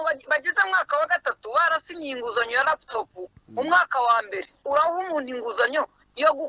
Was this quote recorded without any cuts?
no; 1 cut; at 4.6 s

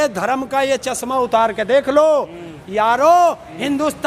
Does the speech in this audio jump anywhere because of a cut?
no; 0 cuts

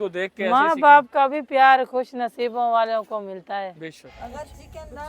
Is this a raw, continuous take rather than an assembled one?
no; 1 cut; at 4.1 s

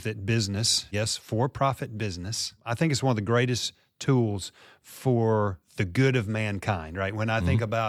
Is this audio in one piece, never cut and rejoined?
no; 2 cuts; at 0.9 s, 2.6 s

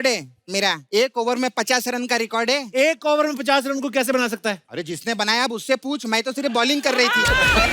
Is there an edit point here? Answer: yes; 2 cuts; at 0.8 s, 4.6 s

